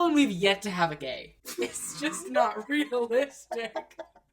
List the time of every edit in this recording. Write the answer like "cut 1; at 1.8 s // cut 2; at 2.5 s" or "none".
cut 1; at 1.3 s